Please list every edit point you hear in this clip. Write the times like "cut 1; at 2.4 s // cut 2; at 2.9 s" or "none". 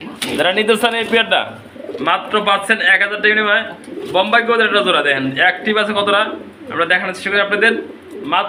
none